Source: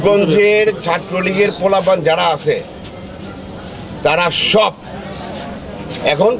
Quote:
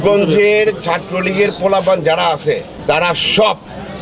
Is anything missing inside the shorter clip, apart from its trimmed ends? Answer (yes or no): yes